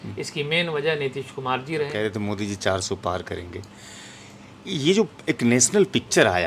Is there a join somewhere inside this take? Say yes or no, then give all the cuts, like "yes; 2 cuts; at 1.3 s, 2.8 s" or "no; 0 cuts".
no; 0 cuts